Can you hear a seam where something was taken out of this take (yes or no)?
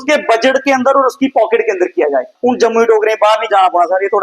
yes